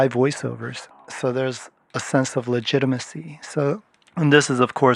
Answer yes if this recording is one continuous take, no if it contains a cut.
no